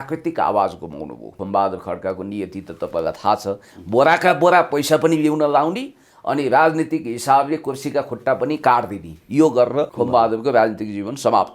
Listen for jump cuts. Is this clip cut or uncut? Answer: cut